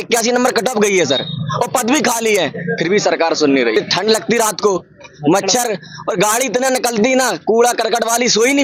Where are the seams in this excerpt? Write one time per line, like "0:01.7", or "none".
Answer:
none